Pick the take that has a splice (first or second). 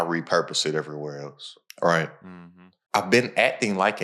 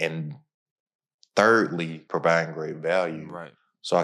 second